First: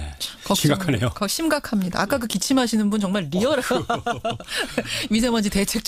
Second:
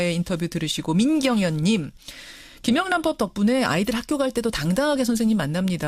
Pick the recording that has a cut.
second; 1 cut; at 1.1 s

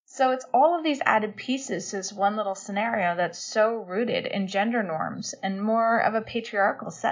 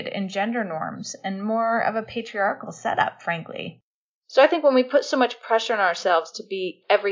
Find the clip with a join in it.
second; 1 cut; at 3.8 s

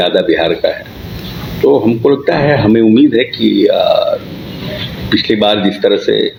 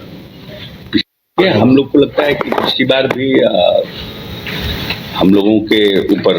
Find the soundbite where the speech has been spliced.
second; 1 cut; at 1.1 s

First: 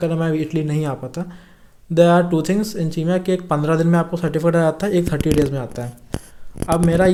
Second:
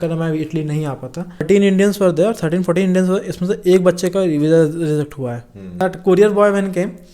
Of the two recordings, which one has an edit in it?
second; 2 cuts; at 1.5 s, 5.7 s

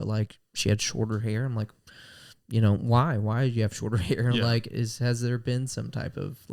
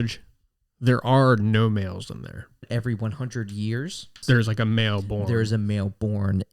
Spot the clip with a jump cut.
second; 2 cuts; at 2.7 s, 4.2 s

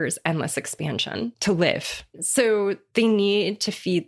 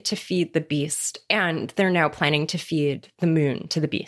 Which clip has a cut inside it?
first; 2 cuts; at 1.4 s, 2.2 s

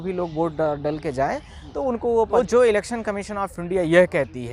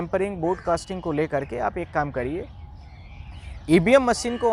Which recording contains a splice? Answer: first; 1 cut; at 2.4 s

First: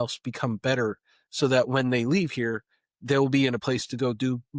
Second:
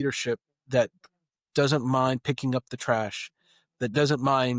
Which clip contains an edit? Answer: first; 1 cut; at 3.6 s

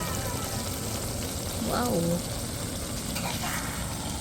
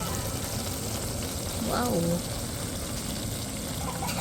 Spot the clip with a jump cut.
first; 1 cut; at 3.2 s

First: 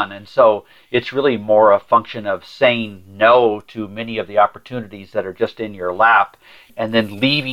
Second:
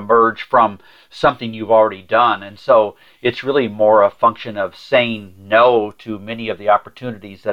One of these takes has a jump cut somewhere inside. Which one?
first; 1 cut; at 6.6 s

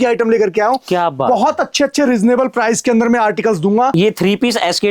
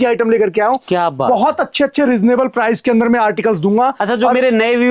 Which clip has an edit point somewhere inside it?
first; 1 cut; at 3.9 s

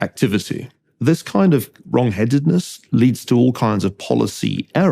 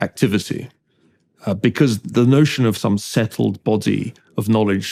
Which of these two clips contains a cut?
first; 1 cut; at 1.1 s

